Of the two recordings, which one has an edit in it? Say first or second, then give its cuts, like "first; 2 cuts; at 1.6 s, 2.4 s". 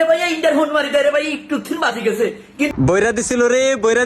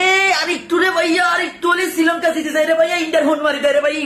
first; 1 cut; at 2.7 s